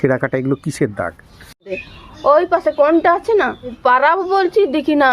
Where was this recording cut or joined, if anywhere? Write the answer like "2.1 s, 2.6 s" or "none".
1.8 s, 3.8 s